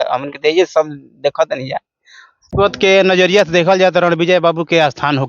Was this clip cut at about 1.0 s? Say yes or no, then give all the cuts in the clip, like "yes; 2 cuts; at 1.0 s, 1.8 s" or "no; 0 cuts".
no; 1 cut; at 2.5 s